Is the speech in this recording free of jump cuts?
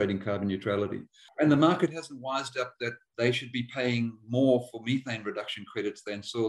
no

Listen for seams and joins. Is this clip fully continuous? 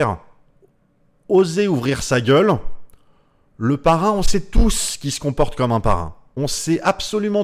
no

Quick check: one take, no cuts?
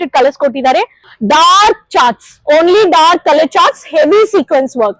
no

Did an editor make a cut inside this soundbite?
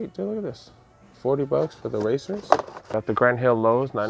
yes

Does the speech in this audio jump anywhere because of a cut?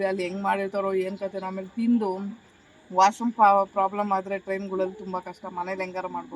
no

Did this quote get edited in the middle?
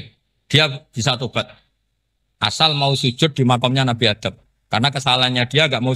no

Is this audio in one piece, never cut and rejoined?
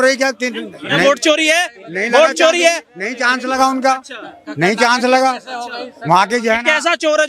yes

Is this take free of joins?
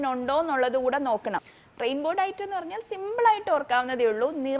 no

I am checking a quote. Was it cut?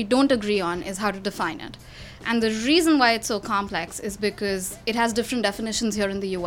no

